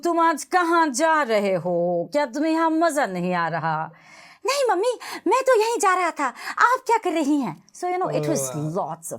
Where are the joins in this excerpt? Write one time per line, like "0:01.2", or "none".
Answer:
none